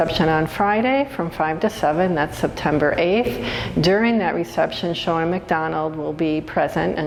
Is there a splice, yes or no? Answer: no